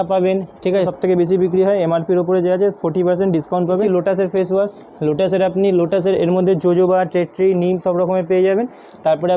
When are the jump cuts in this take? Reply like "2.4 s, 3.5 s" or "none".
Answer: 0.9 s, 3.8 s